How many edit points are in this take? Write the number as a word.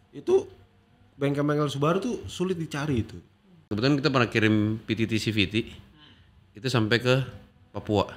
one